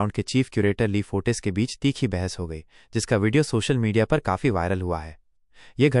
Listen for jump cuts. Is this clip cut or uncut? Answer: uncut